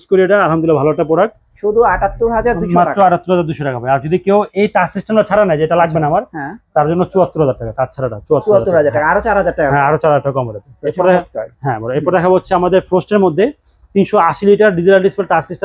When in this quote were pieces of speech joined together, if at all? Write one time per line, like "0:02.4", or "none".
none

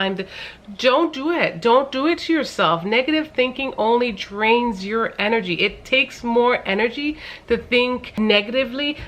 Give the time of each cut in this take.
0:08.1

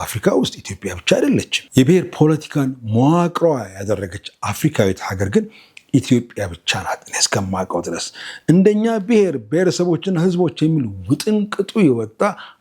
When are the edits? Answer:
0:01.6

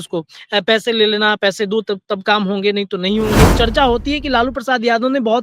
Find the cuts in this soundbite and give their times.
0:03.5

